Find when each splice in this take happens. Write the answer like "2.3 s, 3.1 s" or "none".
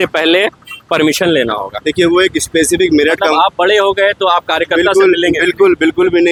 none